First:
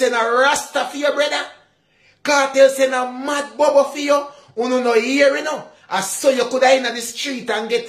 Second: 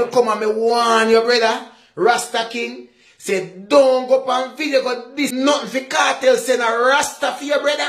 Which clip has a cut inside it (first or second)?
second